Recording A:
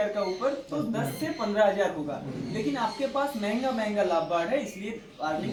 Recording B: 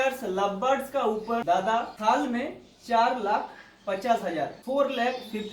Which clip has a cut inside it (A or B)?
B